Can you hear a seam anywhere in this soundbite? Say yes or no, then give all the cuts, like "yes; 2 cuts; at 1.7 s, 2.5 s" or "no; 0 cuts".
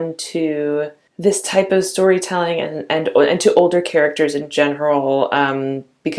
yes; 1 cut; at 1.0 s